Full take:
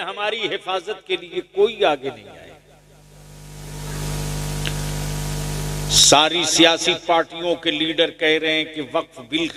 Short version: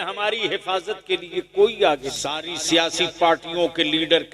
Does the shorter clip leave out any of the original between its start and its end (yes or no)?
yes